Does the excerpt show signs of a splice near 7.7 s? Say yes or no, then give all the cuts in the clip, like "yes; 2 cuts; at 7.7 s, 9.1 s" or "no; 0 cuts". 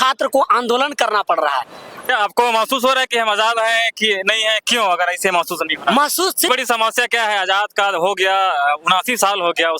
no; 2 cuts; at 2.1 s, 6.5 s